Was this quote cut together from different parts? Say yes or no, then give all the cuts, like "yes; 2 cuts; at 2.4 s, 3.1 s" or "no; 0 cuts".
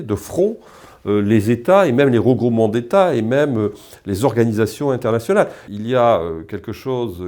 yes; 1 cut; at 5.6 s